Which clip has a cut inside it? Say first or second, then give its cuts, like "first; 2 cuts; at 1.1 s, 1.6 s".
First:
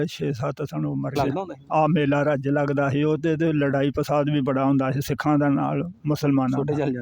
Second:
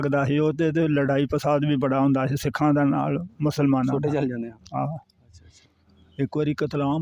first; 1 cut; at 1.2 s